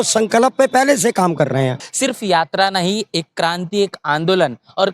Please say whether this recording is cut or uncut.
cut